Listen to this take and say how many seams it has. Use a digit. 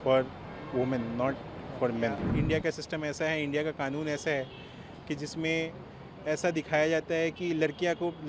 1